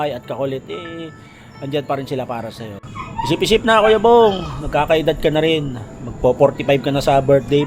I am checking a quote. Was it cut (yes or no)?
yes